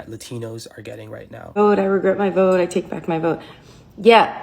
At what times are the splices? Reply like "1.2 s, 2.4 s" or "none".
1.5 s